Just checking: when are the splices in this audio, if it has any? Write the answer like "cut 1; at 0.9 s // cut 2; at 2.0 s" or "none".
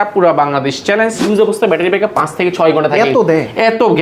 cut 1; at 1.2 s